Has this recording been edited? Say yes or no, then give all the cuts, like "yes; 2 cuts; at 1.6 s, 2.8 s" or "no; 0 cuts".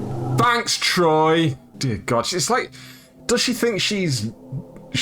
yes; 1 cut; at 1.7 s